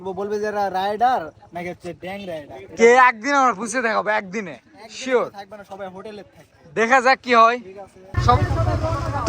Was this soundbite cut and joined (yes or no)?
yes